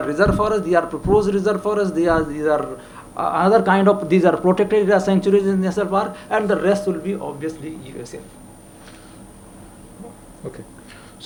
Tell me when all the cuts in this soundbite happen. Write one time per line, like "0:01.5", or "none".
none